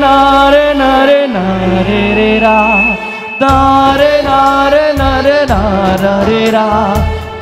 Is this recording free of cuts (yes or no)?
yes